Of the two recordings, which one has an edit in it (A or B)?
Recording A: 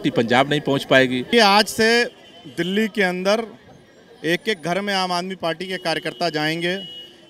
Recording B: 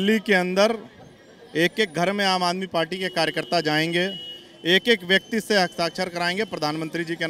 A